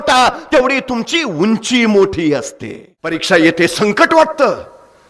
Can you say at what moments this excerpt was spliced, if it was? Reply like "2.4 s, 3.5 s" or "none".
3.2 s